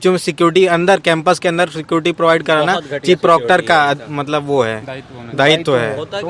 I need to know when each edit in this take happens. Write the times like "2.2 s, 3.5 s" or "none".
none

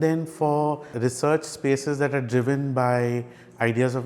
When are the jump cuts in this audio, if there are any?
0.9 s

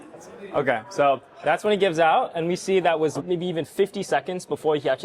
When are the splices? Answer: 3.2 s

